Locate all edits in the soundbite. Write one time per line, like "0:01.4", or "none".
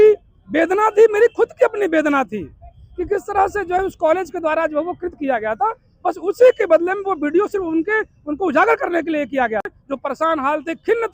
0:09.8